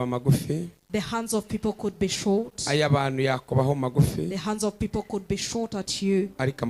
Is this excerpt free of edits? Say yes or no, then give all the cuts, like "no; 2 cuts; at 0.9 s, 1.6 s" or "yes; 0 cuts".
yes; 0 cuts